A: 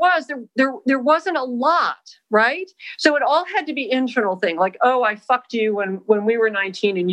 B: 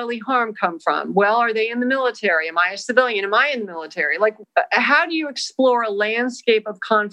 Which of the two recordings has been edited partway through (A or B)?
B